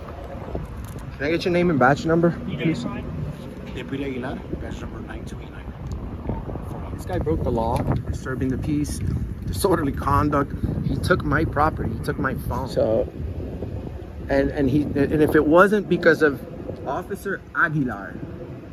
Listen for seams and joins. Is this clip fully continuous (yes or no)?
yes